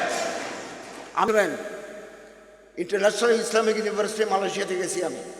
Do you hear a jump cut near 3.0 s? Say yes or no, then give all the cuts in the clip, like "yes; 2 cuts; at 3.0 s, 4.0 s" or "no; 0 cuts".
no; 1 cut; at 1.3 s